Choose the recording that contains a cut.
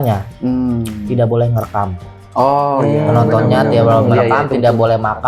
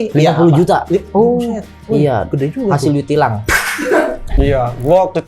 second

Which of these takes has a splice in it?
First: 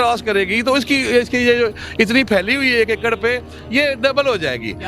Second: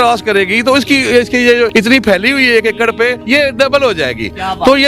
second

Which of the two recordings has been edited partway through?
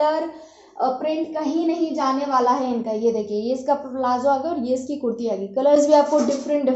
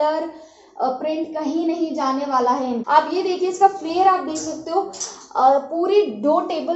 second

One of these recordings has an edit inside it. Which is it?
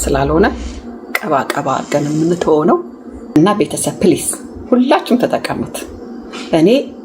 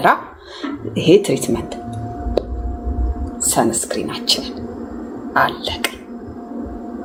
first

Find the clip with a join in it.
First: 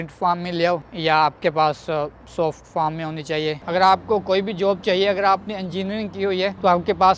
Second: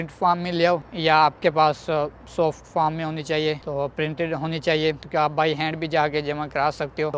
first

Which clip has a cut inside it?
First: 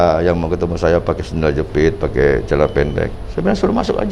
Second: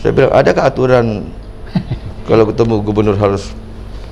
first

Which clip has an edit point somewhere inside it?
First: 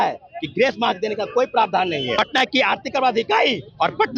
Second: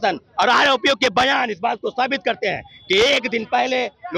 first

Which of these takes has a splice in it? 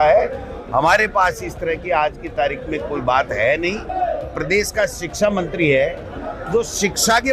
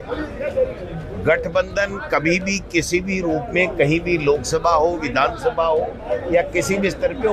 first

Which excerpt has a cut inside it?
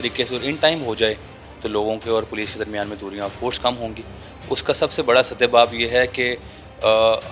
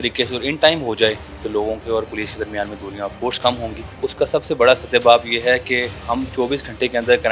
second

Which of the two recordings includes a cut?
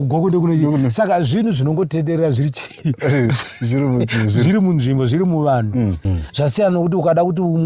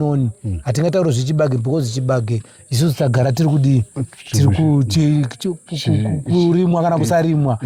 first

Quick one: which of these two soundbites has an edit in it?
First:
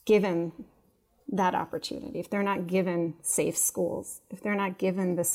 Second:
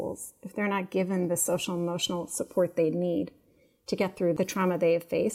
second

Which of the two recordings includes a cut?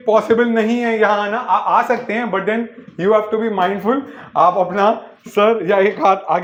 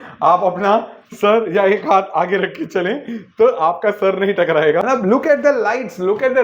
second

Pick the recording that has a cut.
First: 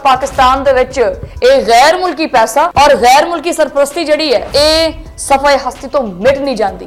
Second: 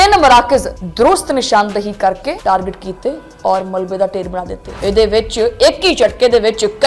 first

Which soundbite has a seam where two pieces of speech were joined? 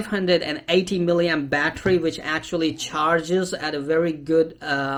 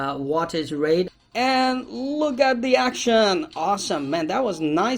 second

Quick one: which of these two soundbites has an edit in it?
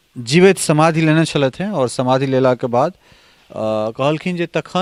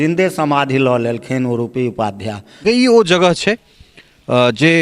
second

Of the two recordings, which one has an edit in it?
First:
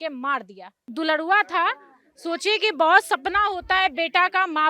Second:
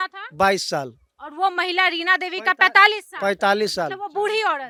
first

